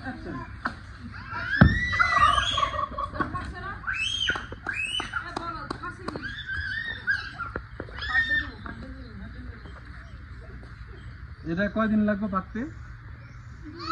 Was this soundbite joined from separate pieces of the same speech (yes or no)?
no